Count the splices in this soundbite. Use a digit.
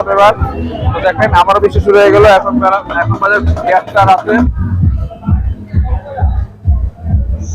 1